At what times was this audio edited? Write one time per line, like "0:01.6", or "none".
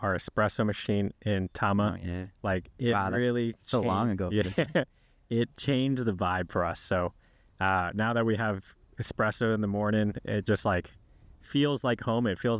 none